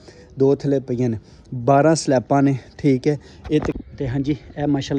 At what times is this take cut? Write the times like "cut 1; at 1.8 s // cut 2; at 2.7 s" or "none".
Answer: cut 1; at 3.8 s